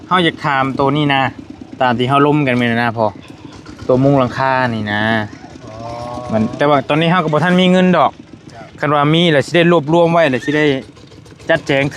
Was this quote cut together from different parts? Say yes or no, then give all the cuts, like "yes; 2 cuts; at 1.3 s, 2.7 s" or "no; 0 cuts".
no; 0 cuts